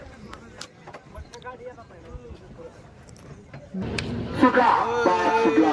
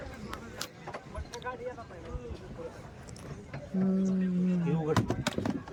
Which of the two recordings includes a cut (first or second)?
first